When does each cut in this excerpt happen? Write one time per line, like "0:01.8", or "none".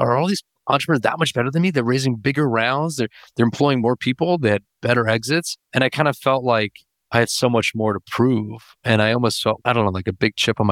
0:05.6
0:09.6